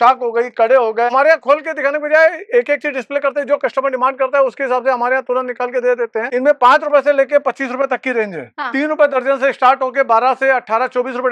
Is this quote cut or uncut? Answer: cut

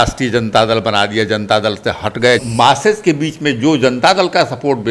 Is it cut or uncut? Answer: cut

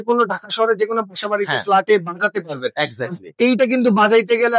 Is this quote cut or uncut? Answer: uncut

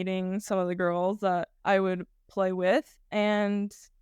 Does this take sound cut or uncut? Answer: cut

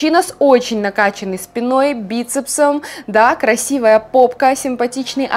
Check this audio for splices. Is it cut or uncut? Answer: uncut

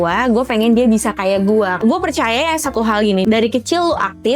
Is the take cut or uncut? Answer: cut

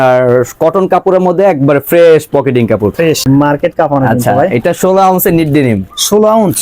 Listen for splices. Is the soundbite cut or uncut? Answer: cut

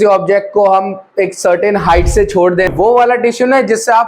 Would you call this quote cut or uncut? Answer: cut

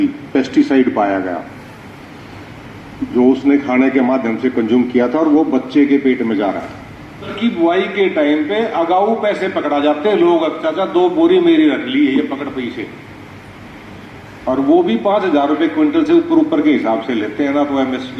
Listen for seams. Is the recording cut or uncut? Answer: cut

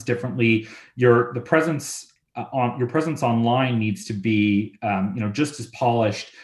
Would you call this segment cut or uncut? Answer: uncut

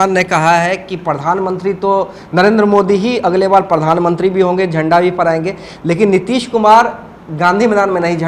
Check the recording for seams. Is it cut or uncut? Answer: uncut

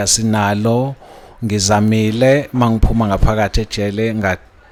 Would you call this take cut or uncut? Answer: uncut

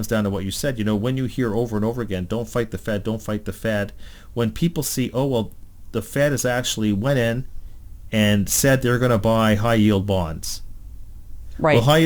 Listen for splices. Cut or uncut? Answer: uncut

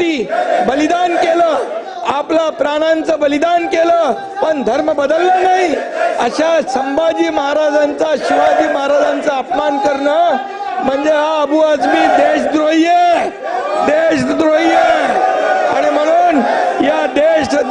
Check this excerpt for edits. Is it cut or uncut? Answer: uncut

